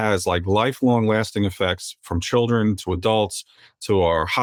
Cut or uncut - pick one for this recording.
uncut